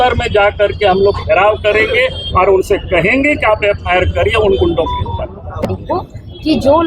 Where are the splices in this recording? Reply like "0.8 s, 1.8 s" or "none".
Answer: 5.8 s